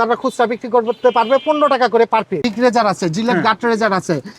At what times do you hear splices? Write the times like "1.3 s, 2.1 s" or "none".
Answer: 2.5 s